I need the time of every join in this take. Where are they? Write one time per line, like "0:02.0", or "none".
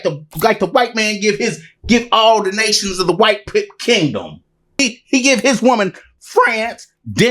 0:04.7